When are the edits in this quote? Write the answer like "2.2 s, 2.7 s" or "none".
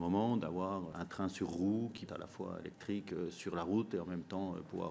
1.0 s, 2.1 s